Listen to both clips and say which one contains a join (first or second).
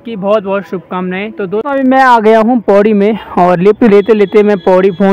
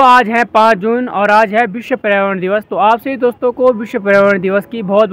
first